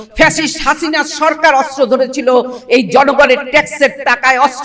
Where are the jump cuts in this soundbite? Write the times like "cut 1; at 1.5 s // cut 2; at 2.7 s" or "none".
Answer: none